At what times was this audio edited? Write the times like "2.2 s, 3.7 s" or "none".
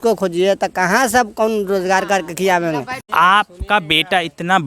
3.0 s